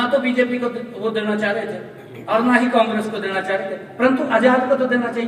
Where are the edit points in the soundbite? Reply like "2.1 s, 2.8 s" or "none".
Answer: none